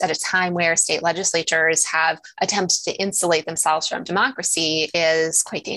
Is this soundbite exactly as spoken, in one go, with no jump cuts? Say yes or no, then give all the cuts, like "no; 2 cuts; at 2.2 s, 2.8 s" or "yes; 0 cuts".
yes; 0 cuts